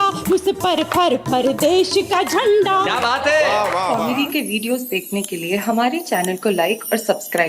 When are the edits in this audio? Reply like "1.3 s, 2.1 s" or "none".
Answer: 4.0 s